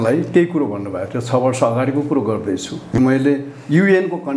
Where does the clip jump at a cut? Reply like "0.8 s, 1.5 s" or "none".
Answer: 3.0 s

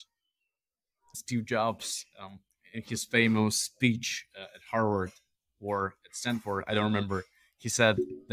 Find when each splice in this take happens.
0.9 s

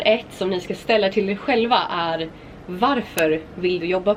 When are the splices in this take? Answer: none

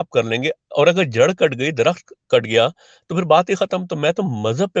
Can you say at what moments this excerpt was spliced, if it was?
none

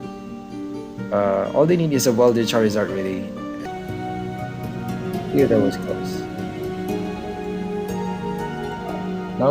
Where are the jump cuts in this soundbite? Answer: 3.6 s

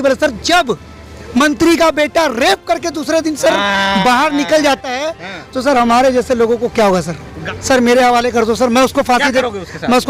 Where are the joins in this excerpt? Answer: 7.4 s

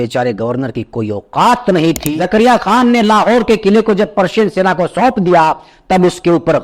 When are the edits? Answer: 2.1 s

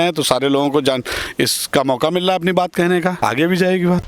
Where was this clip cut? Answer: 3.2 s

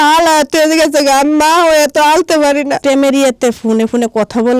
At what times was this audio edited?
2.8 s

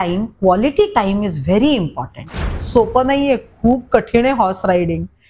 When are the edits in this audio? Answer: 2.6 s

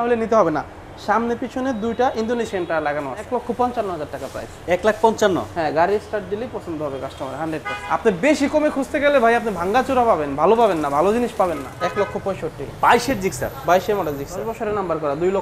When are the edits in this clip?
3.3 s, 7.7 s, 11.7 s, 14.5 s

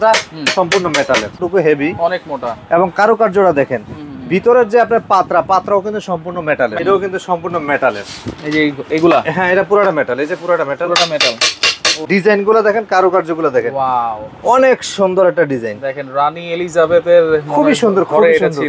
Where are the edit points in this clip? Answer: 1.4 s, 6.7 s, 12.0 s

